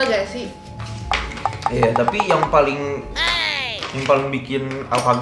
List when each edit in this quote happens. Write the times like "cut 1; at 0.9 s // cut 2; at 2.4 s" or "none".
none